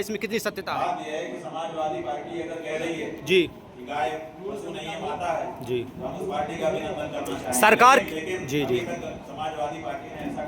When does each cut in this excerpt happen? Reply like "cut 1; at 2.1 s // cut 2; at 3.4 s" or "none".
none